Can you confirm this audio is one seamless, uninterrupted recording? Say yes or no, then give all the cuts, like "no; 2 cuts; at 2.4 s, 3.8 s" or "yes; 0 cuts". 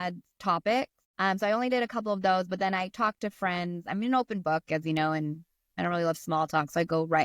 no; 1 cut; at 1.0 s